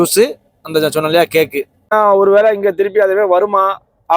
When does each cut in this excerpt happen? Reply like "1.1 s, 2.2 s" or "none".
1.9 s